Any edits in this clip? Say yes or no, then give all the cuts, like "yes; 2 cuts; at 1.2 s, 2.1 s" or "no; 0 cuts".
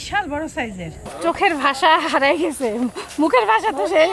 yes; 1 cut; at 1.1 s